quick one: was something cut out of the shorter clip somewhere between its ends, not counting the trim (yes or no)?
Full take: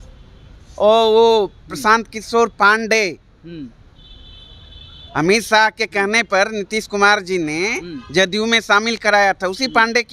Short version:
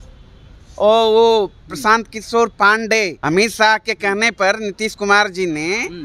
yes